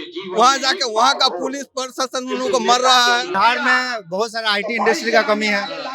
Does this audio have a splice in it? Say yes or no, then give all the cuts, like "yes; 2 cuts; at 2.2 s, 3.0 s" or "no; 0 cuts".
yes; 1 cut; at 3.3 s